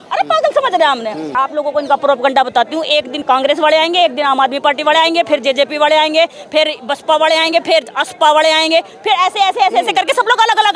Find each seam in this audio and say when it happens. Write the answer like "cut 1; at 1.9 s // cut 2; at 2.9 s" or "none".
cut 1; at 1.3 s // cut 2; at 3.2 s